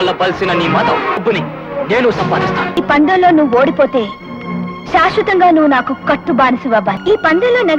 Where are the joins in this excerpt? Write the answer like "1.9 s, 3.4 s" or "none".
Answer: 1.2 s, 2.8 s, 7.0 s